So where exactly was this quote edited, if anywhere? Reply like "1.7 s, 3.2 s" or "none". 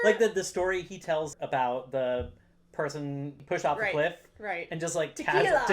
1.4 s, 3.4 s